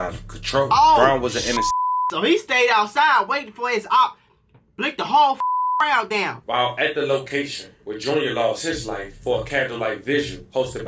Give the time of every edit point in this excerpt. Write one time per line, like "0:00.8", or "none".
0:06.4